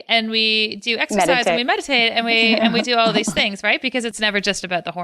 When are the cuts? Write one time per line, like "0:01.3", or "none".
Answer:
0:04.1